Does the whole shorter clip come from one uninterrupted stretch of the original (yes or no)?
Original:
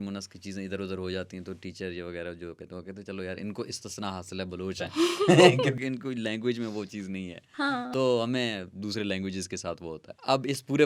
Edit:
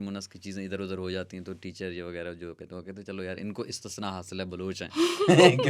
yes